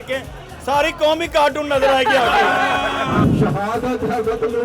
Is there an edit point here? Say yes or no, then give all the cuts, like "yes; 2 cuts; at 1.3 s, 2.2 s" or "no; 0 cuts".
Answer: yes; 1 cut; at 3.3 s